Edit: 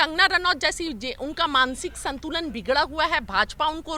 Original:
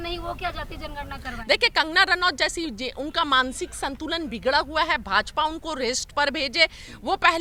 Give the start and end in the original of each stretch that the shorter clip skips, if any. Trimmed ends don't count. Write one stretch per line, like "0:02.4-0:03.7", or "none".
none